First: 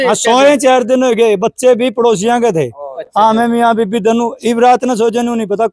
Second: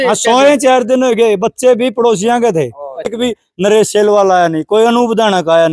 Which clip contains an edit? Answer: second; 1 cut; at 3.1 s

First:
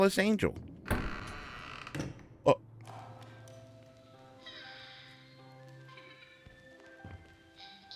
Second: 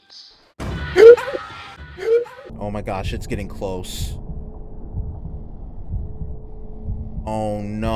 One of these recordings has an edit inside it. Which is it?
second; 1 cut; at 2.4 s

